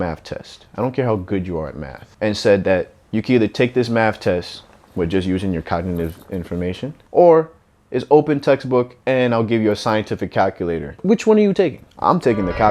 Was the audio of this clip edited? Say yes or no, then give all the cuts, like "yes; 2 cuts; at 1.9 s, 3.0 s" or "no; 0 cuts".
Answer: yes; 2 cuts; at 6.9 s, 11.0 s